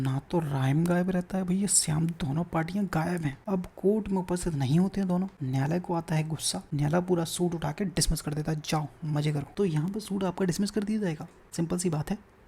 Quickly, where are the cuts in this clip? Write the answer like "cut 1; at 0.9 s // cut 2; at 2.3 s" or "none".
cut 1; at 3.4 s // cut 2; at 5.4 s // cut 3; at 6.6 s // cut 4; at 9.5 s // cut 5; at 11.4 s